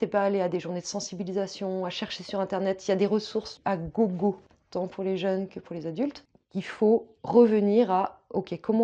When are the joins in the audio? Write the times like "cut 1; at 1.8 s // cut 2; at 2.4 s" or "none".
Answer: cut 1; at 3.5 s // cut 2; at 4.5 s // cut 3; at 6.3 s